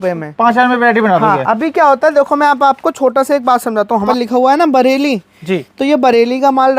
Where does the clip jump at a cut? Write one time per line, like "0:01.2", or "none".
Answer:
0:04.1